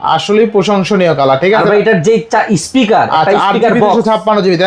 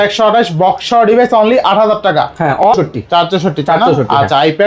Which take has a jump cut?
second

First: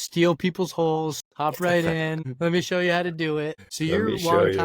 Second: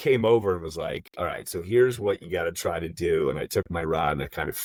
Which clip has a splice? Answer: first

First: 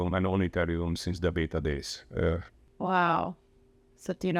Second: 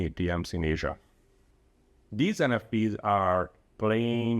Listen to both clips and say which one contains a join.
second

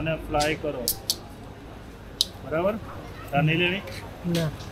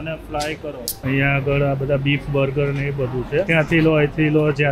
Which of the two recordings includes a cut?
second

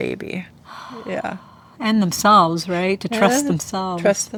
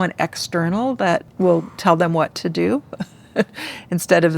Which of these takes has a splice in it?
second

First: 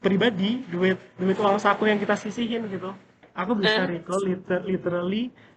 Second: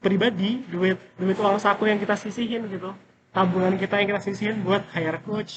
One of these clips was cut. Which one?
first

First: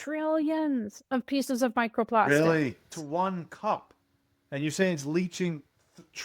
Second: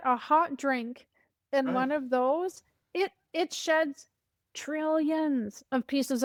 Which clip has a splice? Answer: first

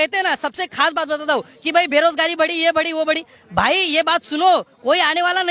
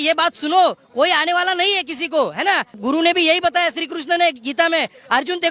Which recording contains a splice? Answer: second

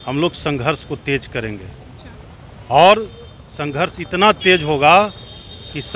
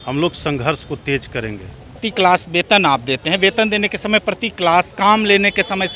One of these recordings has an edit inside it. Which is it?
second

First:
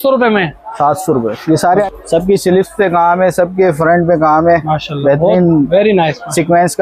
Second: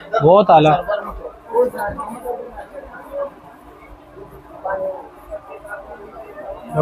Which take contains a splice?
first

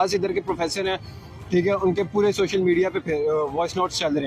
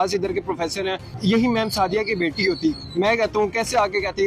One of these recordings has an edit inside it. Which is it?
second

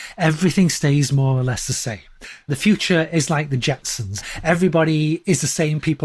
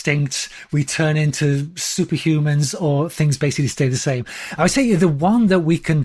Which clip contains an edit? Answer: first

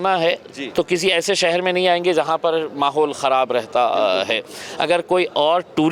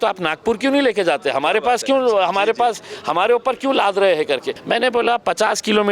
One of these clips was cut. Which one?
second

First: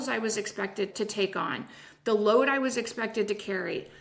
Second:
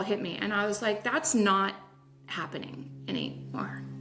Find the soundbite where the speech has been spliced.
first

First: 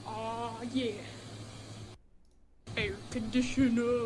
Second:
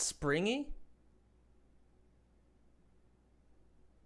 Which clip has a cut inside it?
first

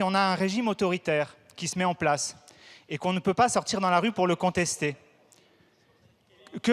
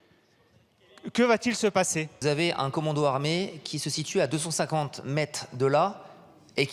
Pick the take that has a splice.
second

